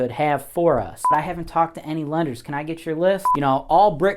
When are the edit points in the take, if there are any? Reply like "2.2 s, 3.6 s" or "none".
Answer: 1.1 s, 3.3 s